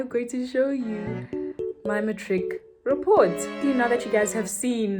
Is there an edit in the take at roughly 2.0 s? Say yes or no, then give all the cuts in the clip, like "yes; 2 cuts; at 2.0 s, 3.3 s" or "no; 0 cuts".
no; 1 cut; at 3.6 s